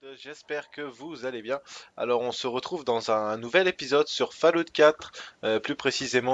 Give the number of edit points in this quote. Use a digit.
0